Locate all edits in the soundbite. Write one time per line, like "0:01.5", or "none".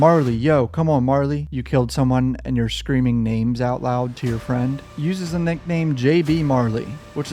0:01.5
0:04.8